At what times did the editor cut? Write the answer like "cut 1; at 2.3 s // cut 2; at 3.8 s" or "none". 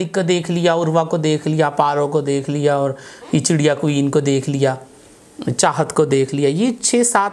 none